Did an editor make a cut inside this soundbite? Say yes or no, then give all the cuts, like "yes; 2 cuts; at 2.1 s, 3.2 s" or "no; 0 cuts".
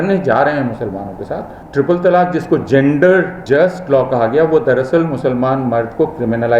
yes; 2 cuts; at 1.6 s, 3.4 s